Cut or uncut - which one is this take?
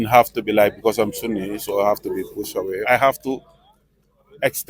cut